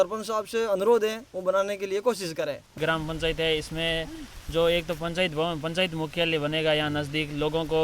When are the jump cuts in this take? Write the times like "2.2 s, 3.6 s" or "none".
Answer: 2.7 s